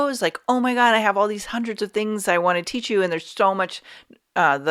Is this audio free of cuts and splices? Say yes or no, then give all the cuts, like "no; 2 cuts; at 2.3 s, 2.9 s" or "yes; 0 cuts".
yes; 0 cuts